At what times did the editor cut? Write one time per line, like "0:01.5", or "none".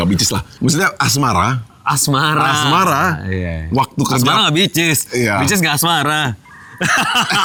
none